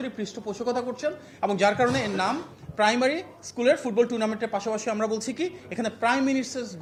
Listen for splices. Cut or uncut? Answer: uncut